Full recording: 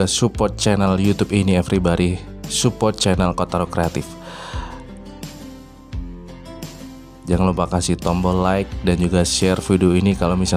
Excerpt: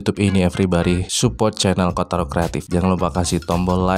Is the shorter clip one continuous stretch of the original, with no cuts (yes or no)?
no